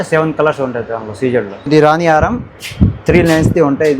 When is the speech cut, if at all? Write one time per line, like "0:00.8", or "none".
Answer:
0:01.7